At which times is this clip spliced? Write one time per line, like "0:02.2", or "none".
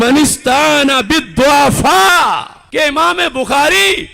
0:02.6